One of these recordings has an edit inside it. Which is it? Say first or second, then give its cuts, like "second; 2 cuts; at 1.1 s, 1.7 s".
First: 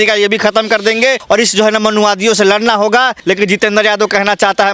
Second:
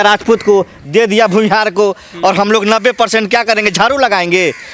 first; 2 cuts; at 1.2 s, 3.2 s